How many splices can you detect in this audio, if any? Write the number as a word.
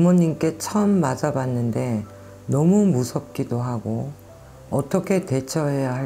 zero